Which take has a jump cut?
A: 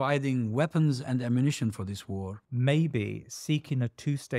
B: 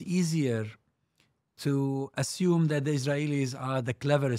A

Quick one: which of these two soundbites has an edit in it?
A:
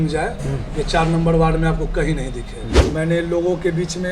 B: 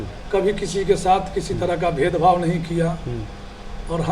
A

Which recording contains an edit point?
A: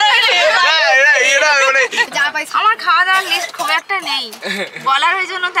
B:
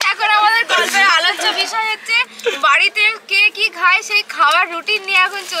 A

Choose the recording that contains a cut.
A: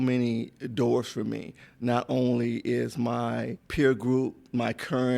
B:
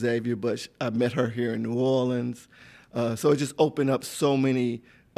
A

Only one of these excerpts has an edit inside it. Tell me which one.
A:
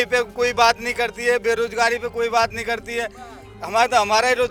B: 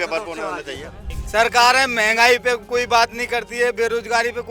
B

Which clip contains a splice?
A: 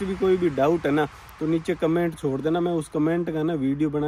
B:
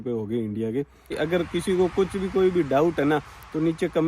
B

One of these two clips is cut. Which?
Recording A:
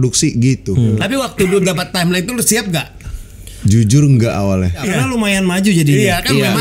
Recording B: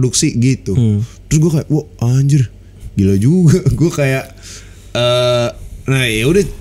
A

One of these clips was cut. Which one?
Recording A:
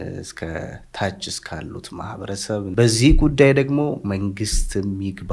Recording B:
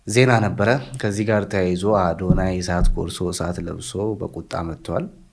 A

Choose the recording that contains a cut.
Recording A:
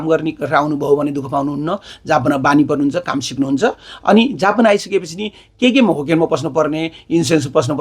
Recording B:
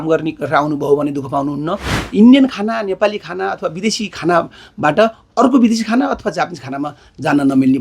B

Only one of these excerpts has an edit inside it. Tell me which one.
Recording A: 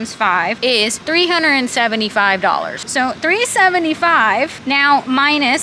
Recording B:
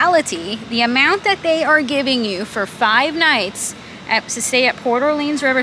A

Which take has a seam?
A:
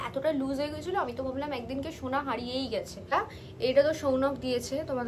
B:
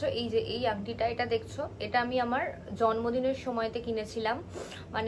A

